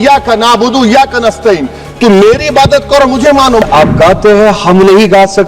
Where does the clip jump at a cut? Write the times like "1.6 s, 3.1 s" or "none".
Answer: 3.6 s